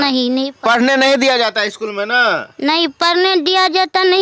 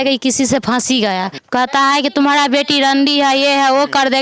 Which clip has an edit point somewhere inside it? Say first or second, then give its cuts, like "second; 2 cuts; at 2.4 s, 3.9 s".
second; 1 cut; at 1.4 s